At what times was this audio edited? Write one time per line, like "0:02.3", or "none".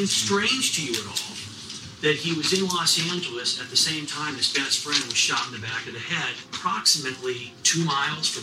0:06.4
0:07.5